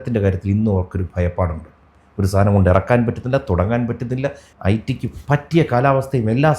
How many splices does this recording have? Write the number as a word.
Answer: one